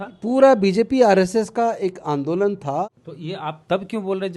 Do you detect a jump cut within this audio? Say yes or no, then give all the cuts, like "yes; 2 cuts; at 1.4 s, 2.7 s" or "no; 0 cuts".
yes; 1 cut; at 2.9 s